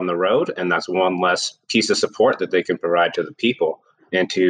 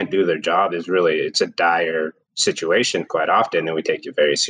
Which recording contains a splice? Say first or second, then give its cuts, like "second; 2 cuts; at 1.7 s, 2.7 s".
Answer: second; 1 cut; at 1.3 s